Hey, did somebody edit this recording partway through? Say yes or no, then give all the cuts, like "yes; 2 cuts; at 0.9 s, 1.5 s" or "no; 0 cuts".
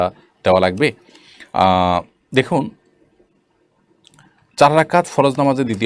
no; 0 cuts